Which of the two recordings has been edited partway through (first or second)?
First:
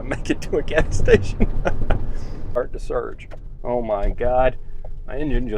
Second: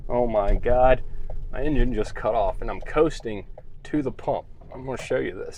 first